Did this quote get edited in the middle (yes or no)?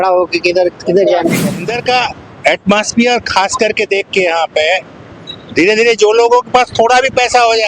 yes